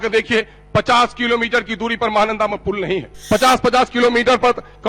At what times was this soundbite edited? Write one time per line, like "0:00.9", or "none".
0:03.1